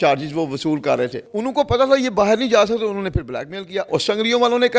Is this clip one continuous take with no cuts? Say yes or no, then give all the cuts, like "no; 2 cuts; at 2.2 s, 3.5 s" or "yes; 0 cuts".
no; 2 cuts; at 1.3 s, 3.9 s